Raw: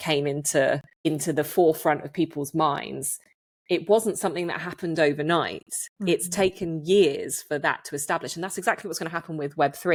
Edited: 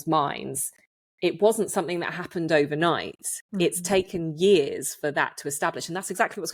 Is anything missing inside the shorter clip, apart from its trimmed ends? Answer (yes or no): no